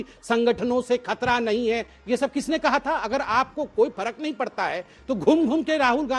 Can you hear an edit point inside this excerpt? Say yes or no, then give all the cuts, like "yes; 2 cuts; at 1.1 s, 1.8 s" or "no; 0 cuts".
no; 0 cuts